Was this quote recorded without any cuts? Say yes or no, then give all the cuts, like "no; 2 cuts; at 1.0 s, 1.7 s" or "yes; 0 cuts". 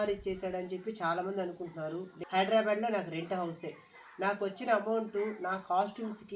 no; 1 cut; at 2.1 s